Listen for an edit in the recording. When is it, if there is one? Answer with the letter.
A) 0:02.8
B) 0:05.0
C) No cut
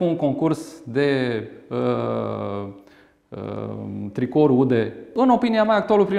B